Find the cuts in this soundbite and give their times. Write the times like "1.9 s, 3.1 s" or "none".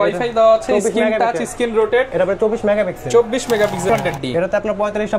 3.9 s